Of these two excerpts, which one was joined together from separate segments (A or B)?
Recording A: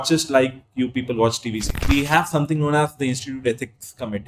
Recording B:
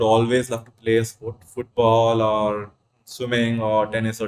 A